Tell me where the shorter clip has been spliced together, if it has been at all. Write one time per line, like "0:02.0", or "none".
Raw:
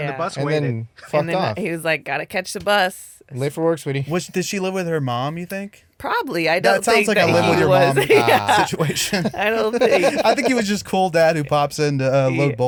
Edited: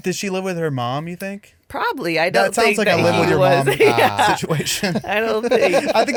none